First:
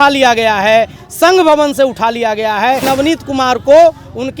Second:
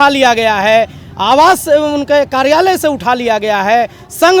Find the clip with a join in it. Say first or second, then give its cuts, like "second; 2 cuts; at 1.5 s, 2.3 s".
first; 2 cuts; at 1.0 s, 2.8 s